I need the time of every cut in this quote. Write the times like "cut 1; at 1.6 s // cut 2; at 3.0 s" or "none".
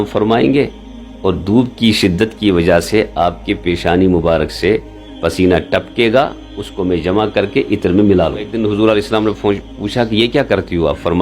cut 1; at 8.5 s